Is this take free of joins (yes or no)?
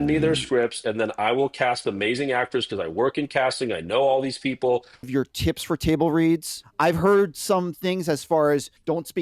no